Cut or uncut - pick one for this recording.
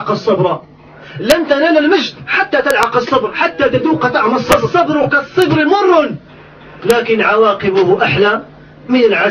cut